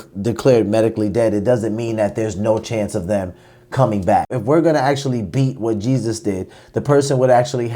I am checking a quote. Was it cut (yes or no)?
yes